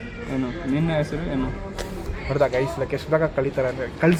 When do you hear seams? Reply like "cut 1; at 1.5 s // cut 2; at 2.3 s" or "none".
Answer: none